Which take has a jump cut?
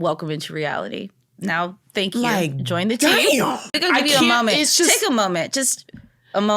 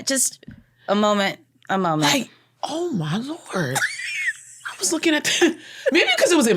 first; 1 cut; at 3.7 s

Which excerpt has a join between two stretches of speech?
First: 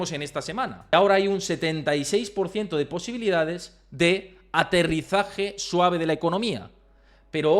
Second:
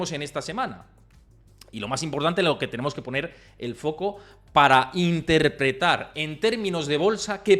first; 1 cut; at 0.9 s

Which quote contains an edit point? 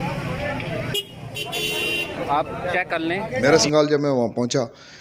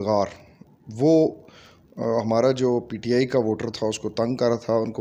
first; 1 cut; at 3.4 s

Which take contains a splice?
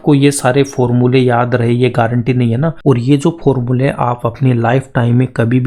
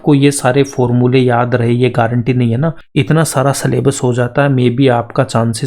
first; 1 cut; at 2.8 s

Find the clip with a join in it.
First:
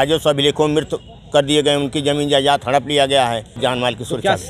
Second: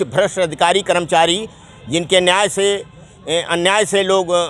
first; 1 cut; at 3.6 s

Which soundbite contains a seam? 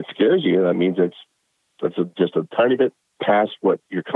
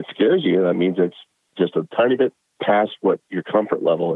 second; 1 cut; at 1.5 s

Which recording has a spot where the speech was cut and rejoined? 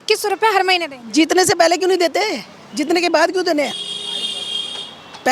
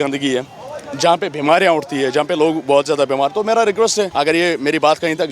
second; 1 cut; at 4.1 s

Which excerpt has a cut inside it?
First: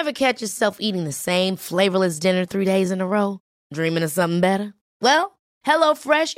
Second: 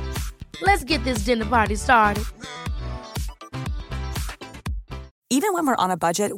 second; 1 cut; at 5.1 s

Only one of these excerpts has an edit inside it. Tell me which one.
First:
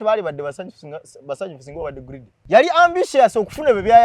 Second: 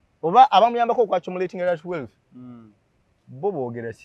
first; 1 cut; at 2.3 s

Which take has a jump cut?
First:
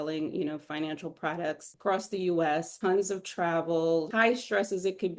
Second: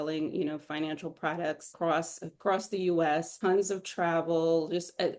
first; 2 cuts; at 1.7 s, 4.1 s

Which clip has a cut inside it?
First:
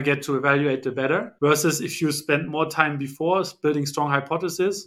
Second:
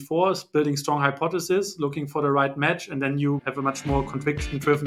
second; 1 cut; at 3.4 s

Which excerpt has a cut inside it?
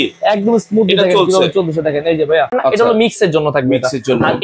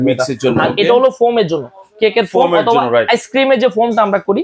first; 1 cut; at 2.5 s

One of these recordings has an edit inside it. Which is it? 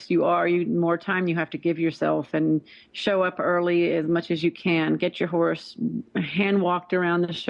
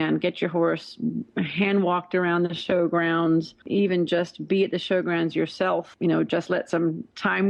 second; 2 cuts; at 3.7 s, 5.9 s

